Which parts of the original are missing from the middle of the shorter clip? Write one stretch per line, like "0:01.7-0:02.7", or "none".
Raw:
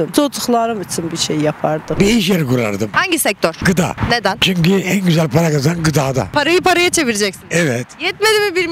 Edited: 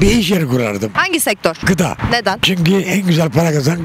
none